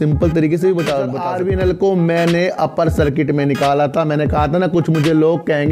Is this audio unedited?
no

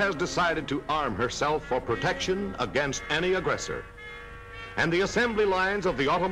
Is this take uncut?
yes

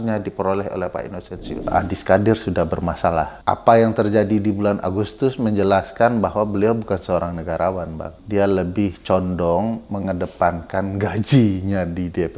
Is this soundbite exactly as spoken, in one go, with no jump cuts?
no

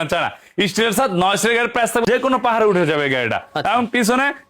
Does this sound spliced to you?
yes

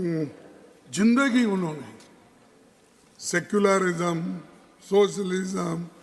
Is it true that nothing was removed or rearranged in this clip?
yes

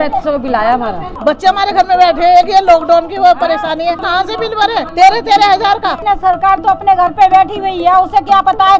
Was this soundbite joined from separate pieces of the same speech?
yes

